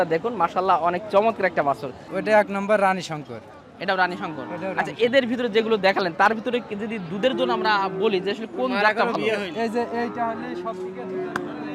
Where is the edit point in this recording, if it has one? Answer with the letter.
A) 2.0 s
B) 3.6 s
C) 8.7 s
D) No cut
A